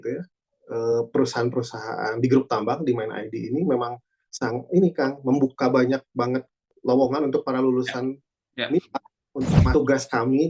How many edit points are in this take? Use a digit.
2